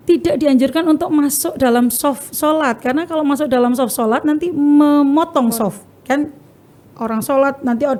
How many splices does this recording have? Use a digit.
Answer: 0